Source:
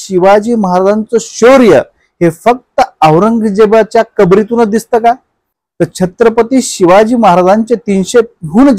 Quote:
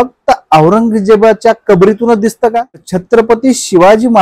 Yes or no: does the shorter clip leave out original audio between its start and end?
yes